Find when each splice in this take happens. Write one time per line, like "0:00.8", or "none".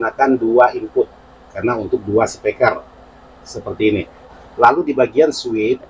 0:04.4